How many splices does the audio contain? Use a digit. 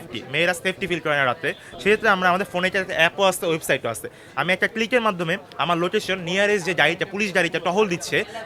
0